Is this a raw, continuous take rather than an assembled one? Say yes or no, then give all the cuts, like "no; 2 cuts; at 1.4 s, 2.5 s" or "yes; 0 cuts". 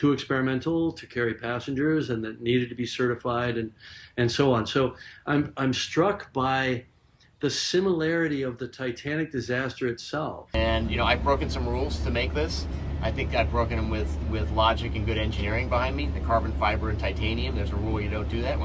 no; 1 cut; at 10.5 s